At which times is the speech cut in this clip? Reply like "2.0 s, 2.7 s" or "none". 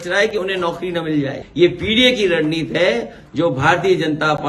1.4 s